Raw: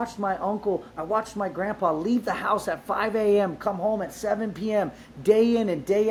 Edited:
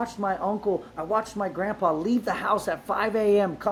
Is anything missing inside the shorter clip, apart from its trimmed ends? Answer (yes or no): no